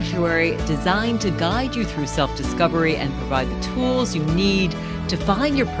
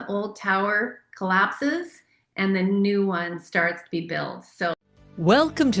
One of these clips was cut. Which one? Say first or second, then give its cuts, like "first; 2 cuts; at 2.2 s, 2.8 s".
second; 1 cut; at 4.7 s